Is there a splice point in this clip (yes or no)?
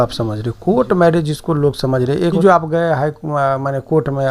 yes